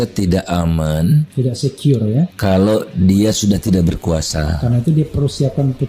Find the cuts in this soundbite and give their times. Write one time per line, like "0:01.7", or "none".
0:02.3